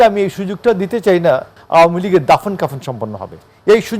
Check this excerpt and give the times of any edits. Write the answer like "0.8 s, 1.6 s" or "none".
1.6 s